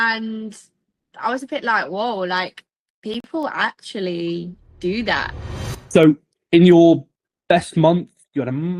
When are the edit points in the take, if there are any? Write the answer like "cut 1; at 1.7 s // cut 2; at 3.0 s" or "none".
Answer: cut 1; at 5.3 s